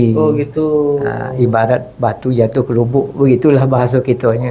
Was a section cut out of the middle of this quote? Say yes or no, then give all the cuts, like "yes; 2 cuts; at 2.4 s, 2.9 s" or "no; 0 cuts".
no; 0 cuts